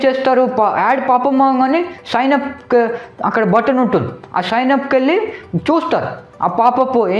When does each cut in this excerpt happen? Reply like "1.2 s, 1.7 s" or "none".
none